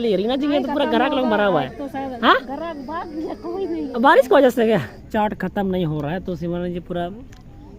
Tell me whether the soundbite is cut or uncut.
cut